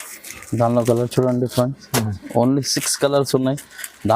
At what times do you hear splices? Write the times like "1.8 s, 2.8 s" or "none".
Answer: none